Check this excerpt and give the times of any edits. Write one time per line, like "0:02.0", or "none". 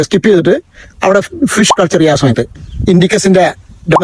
0:02.5